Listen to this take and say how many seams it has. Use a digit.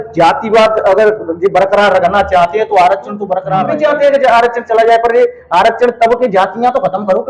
1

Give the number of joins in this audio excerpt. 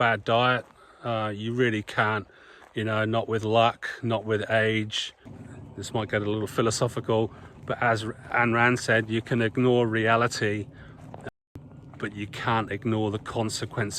1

